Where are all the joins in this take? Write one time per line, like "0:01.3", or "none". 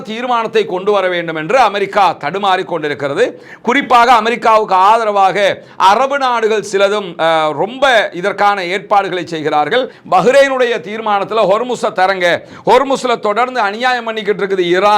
0:10.0